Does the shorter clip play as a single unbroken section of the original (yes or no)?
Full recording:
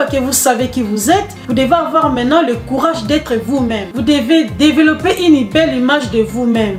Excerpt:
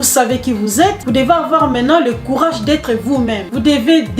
no